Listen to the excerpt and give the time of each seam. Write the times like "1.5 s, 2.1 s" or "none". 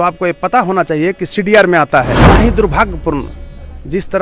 2.1 s

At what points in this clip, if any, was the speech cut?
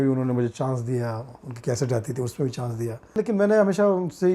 3.2 s

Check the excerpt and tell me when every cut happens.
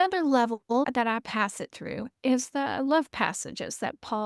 0.9 s, 2.1 s

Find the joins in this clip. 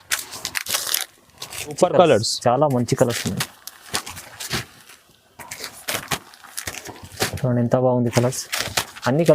1.8 s

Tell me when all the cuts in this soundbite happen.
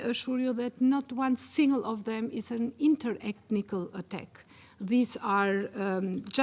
none

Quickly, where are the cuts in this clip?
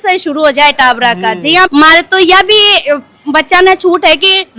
1.7 s

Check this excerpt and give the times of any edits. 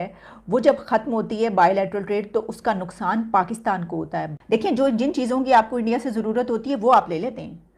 4.3 s

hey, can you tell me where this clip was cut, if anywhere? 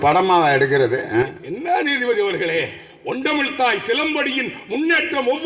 none

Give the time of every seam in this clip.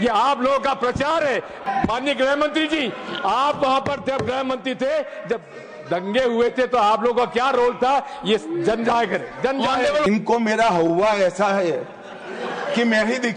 1.6 s, 10.1 s

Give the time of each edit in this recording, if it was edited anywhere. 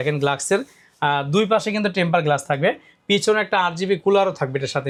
none

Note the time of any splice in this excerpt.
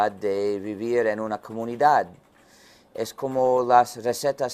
3.2 s

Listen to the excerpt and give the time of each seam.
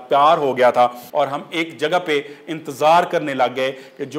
1.0 s

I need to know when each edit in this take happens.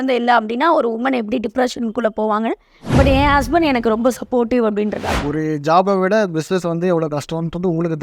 5.1 s

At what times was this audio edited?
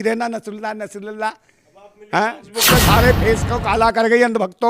2.7 s

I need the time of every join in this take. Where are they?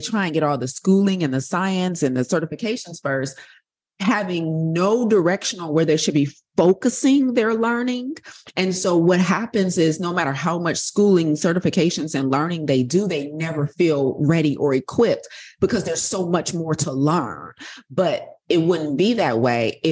none

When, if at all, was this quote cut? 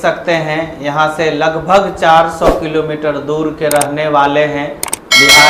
none

